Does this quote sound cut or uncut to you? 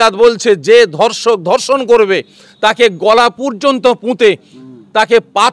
uncut